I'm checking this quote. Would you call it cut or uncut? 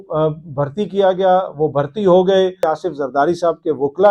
cut